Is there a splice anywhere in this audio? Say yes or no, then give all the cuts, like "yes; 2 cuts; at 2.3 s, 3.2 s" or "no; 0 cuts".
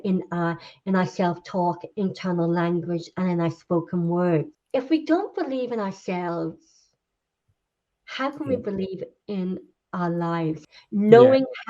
yes; 2 cuts; at 4.6 s, 10.6 s